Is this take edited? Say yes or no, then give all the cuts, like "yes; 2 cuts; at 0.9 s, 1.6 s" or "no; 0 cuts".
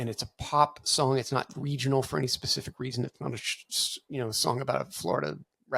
no; 0 cuts